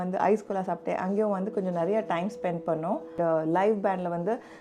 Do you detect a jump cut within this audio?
yes; 1 cut; at 3.1 s

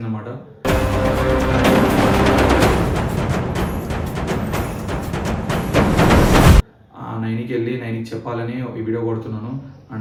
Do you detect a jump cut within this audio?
no; 0 cuts

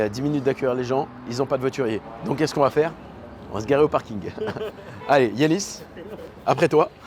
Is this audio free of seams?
yes; 0 cuts

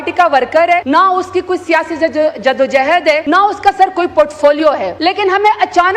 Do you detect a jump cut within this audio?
yes; 3 cuts; at 0.8 s, 3.2 s, 4.9 s

